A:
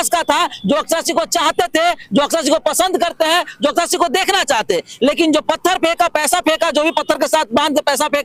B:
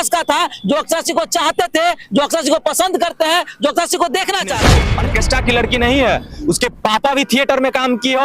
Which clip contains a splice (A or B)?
B